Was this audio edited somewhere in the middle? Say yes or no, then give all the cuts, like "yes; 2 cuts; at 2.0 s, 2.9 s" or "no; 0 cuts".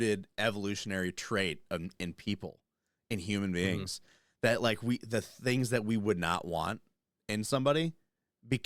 no; 0 cuts